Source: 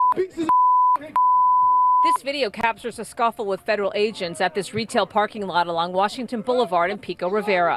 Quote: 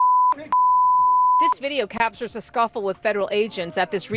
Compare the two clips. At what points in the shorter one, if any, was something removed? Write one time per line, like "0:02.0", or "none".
none